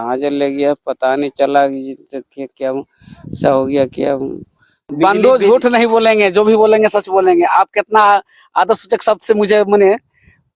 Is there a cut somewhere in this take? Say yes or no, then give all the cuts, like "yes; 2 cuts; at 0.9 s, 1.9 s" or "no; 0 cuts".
yes; 1 cut; at 4.8 s